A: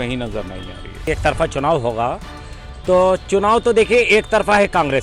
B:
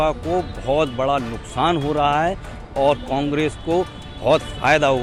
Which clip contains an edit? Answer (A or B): A